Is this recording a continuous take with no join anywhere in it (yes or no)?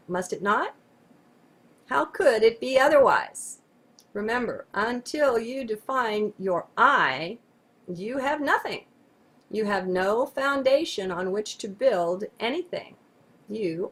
yes